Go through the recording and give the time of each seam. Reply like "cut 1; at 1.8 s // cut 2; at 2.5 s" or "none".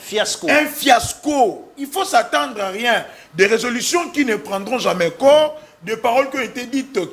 none